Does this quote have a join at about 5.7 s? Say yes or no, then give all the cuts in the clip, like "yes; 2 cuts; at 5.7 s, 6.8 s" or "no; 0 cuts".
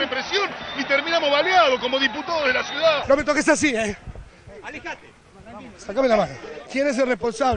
no; 1 cut; at 3.0 s